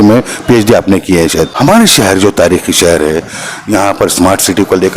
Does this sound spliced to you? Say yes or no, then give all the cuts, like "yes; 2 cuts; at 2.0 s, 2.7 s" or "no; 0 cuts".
yes; 1 cut; at 1.5 s